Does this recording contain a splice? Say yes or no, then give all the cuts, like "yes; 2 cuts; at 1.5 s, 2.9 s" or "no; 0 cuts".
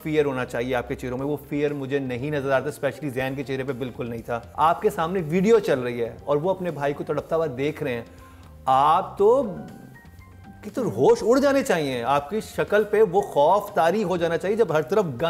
no; 0 cuts